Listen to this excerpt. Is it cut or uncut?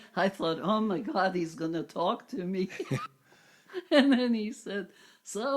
cut